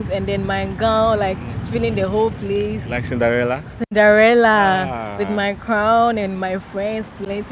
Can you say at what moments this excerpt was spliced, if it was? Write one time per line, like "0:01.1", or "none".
none

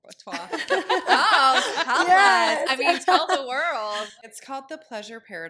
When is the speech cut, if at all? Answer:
0:04.1

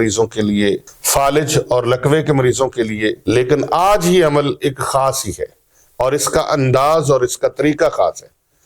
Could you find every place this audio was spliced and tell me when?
0:00.9
0:03.2

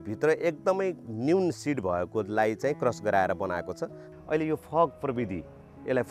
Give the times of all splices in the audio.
0:04.0

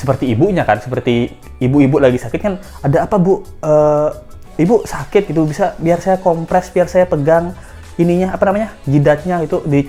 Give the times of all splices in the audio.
none

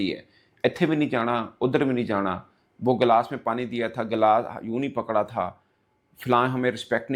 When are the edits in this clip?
none

